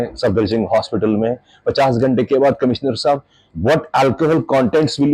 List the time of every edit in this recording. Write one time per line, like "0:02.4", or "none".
none